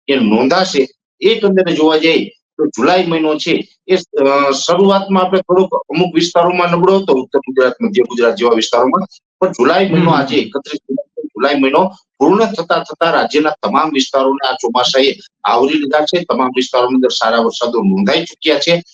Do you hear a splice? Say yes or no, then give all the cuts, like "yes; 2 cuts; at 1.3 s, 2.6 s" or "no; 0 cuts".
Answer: no; 0 cuts